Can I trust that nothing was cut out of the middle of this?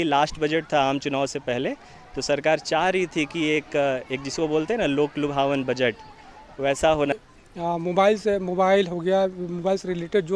no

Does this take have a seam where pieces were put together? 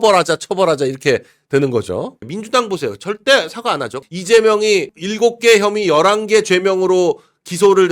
yes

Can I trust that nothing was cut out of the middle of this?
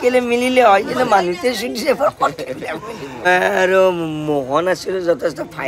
no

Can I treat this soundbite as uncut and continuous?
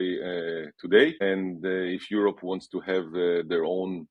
no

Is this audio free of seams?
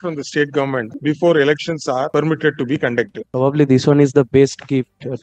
no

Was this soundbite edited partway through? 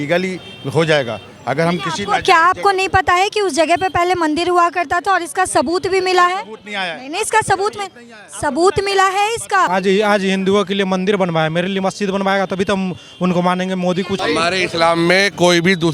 yes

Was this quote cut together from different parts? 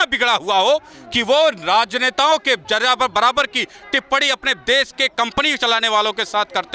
no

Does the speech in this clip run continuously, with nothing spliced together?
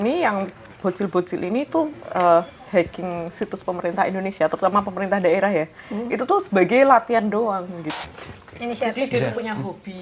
no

